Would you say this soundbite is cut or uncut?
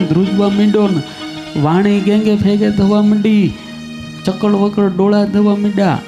uncut